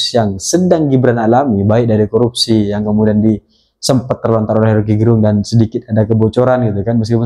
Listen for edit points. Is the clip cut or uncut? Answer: uncut